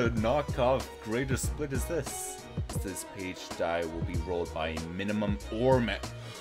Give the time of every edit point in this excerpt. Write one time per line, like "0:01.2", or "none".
0:02.7